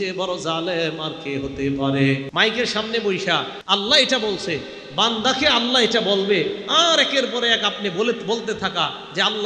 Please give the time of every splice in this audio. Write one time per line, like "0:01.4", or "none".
0:02.3
0:03.6